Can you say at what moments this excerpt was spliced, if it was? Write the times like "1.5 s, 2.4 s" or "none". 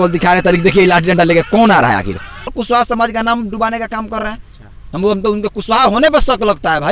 2.6 s